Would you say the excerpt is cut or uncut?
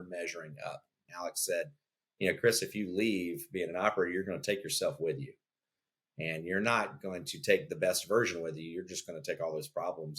cut